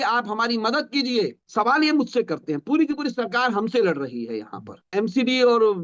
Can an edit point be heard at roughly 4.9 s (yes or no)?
yes